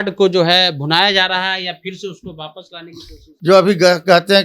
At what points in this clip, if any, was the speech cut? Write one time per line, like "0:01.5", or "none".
0:03.3